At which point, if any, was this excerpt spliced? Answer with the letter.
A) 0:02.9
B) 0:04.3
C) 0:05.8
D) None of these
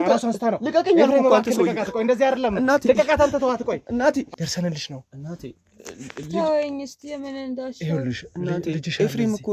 B